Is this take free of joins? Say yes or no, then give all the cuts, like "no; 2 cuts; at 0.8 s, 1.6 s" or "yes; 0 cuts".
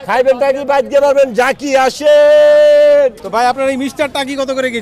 yes; 0 cuts